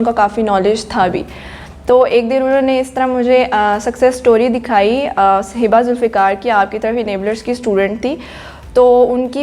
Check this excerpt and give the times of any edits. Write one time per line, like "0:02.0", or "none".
none